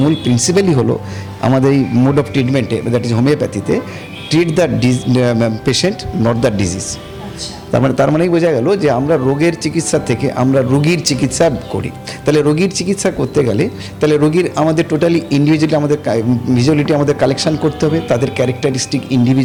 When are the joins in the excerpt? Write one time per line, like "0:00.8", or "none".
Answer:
none